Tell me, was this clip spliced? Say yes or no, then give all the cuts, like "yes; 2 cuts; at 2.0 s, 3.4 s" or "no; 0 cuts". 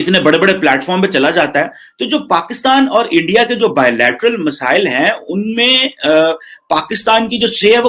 no; 0 cuts